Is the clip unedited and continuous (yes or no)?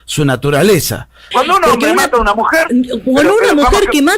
no